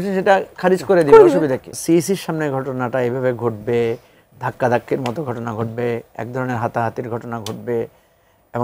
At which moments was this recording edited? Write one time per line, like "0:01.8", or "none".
0:01.7